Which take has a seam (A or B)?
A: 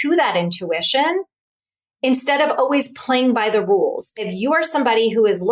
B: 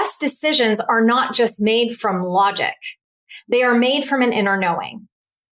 A